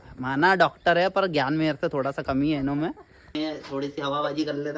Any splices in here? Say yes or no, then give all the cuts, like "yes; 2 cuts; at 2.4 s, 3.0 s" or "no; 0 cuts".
yes; 1 cut; at 3.3 s